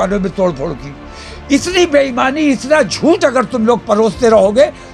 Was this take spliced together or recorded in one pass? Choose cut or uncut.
uncut